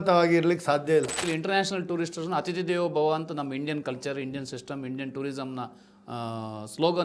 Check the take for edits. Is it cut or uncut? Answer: cut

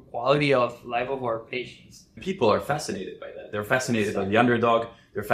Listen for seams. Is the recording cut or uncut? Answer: cut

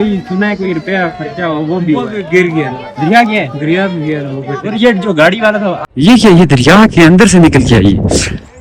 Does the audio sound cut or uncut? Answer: cut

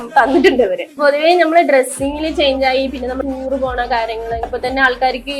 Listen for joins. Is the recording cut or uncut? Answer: cut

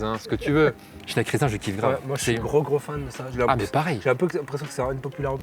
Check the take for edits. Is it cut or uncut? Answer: cut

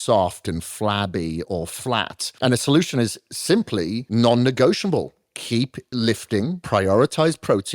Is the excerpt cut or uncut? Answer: cut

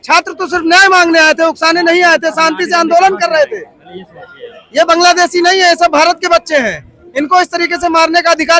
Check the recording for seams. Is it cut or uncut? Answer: uncut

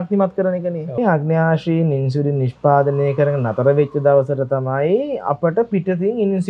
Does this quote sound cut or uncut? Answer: cut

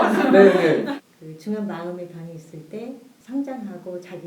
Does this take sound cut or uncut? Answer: cut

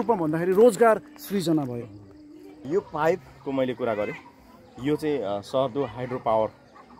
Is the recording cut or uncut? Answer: cut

